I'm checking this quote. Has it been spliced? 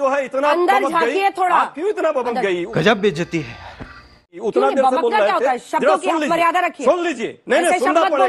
no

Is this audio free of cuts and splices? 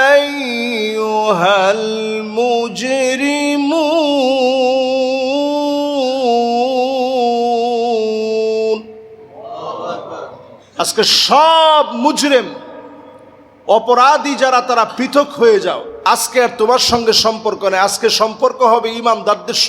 no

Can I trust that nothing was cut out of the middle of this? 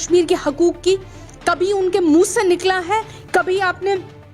no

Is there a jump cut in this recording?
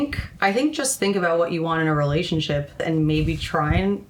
yes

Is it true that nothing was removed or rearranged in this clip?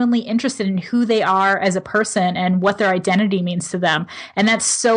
yes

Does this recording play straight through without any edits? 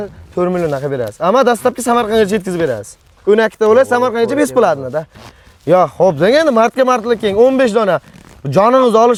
yes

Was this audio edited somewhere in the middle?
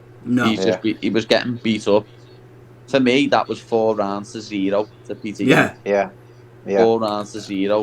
no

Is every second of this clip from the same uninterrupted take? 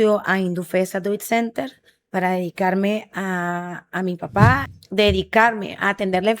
no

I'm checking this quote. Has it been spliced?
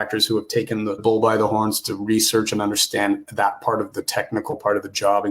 yes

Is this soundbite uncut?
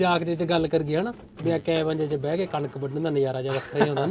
yes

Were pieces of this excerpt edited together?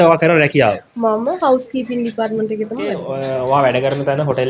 yes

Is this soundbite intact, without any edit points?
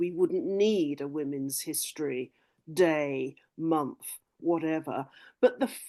yes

